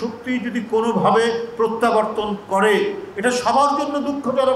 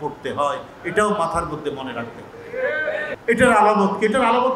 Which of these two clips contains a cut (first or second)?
second